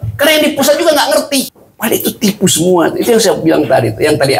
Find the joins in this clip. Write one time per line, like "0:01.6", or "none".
0:01.6